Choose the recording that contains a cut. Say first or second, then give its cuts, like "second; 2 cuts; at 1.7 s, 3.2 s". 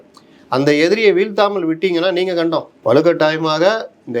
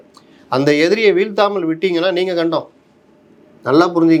first; 1 cut; at 2.7 s